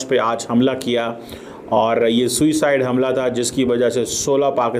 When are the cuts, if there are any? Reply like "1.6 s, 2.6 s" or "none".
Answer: none